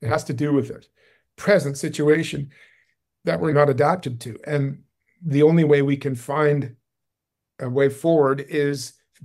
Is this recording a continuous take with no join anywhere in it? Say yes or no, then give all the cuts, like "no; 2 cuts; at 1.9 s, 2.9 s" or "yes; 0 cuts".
no; 1 cut; at 3.5 s